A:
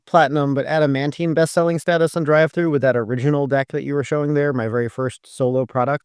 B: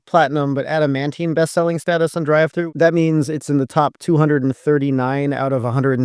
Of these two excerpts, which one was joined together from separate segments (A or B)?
B